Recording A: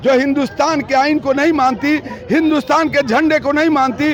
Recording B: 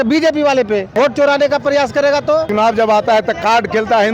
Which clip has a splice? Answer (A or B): B